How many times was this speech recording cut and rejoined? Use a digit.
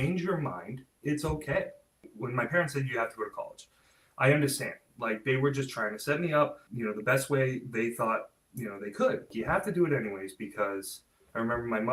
4